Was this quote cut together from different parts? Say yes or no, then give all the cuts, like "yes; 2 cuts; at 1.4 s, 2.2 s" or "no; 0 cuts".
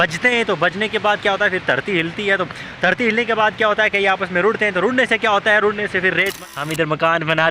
yes; 1 cut; at 6.4 s